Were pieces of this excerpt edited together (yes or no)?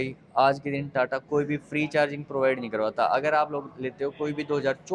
no